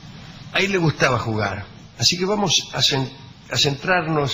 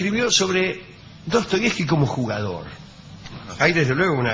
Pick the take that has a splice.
second; 1 cut; at 1.2 s

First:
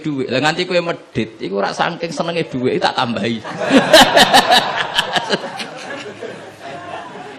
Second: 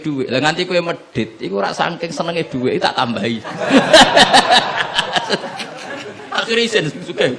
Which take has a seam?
second; 1 cut; at 6.2 s

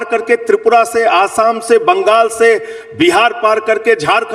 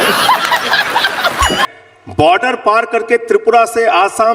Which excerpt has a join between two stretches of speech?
second; 1 cut; at 1.6 s

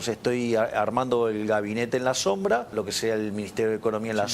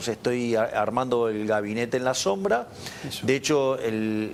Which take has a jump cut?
first; 1 cut; at 2.7 s

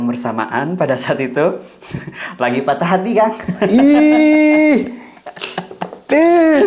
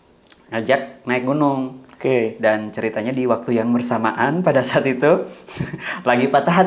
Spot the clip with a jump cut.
second; 1 cut; at 1.8 s

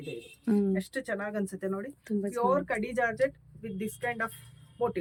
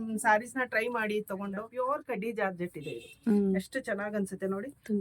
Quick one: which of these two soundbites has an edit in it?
second; 1 cut; at 1.6 s

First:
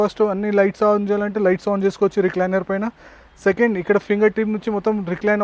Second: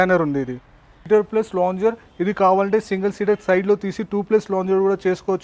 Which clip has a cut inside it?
second; 1 cut; at 1.1 s

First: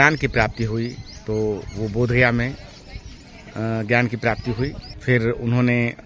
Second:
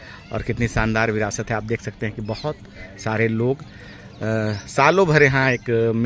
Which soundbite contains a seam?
first; 1 cut; at 4.9 s

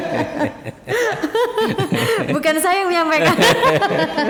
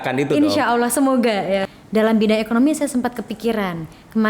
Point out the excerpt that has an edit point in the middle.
second; 1 cut; at 1.7 s

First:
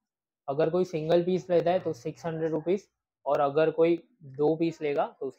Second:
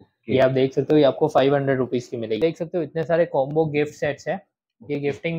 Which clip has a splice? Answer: second; 1 cut; at 2.4 s

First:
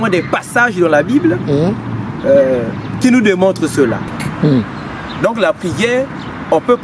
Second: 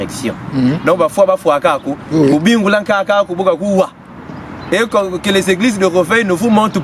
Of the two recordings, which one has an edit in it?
first; 1 cut; at 4.1 s

